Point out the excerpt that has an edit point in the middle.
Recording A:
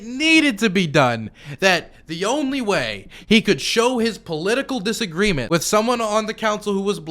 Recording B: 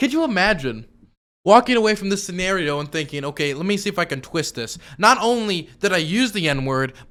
A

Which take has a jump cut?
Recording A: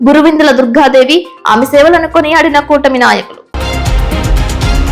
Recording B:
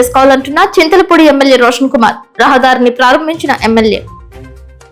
A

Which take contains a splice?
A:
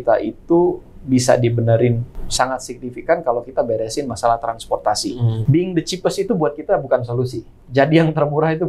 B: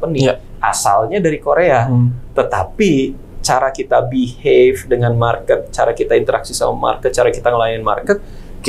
A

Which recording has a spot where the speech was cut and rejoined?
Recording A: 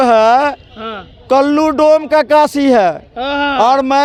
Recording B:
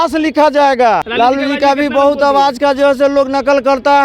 B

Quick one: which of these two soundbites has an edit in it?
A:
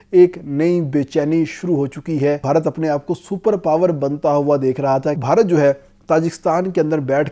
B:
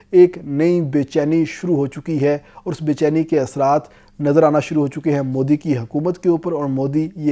A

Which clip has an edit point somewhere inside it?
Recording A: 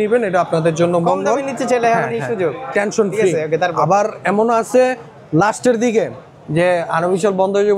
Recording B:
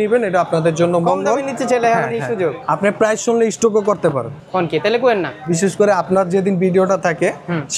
B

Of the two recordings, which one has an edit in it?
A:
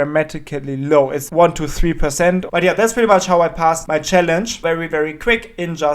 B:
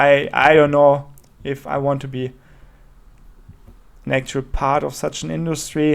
A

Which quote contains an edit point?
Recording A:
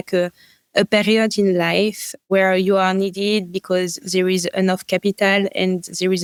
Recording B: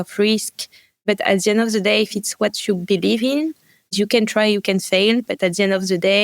B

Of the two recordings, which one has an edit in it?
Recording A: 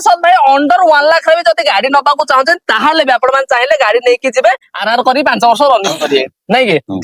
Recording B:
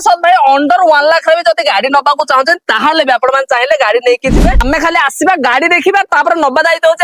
B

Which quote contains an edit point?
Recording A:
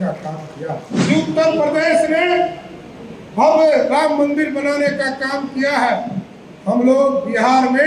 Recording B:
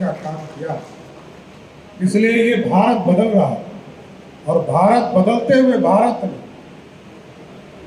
A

